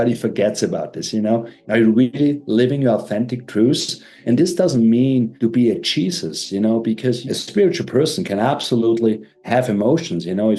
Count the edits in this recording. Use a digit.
4